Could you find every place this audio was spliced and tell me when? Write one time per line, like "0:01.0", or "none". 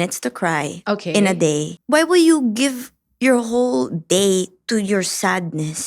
0:01.7